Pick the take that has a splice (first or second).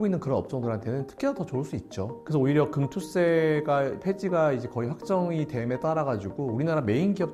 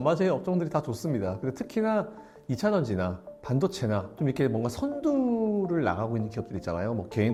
first